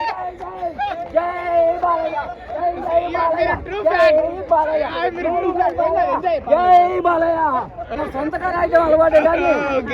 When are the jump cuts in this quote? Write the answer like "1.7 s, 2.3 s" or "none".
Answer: 7.9 s